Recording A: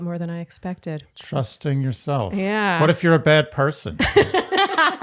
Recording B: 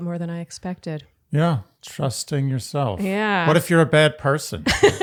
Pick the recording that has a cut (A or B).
A